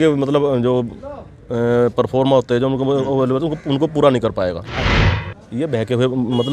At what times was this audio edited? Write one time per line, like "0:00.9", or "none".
0:05.1

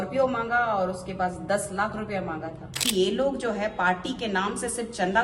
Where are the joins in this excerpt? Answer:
0:02.8

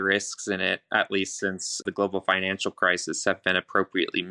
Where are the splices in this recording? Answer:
0:01.8

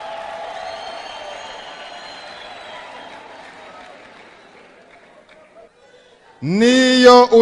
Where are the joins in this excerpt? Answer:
0:05.7

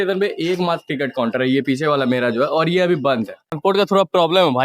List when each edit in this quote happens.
0:03.4

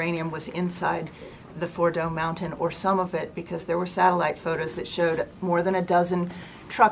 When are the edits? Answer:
none

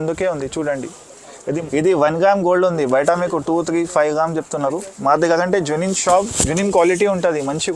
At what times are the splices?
0:01.4

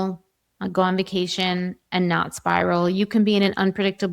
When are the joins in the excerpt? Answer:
none

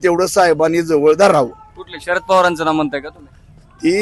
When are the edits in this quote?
none

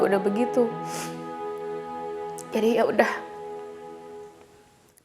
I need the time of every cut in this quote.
none

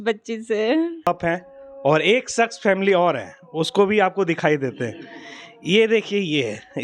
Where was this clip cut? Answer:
0:01.1

